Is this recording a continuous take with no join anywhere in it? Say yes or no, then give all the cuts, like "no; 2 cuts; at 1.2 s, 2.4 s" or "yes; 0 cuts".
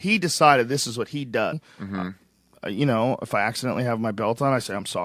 yes; 0 cuts